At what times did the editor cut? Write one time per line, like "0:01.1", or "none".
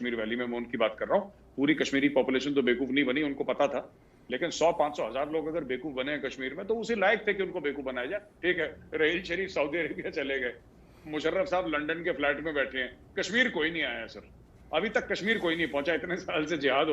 0:08.3